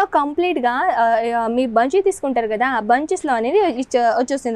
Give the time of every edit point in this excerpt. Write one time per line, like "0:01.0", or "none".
none